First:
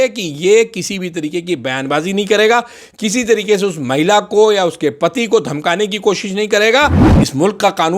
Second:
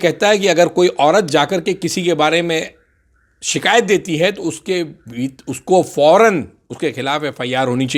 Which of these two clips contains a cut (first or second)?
first